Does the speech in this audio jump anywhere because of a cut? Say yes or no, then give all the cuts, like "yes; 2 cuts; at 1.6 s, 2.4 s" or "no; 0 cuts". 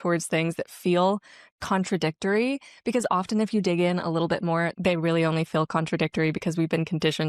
no; 0 cuts